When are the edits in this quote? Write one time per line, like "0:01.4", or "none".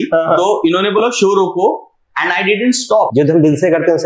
0:03.1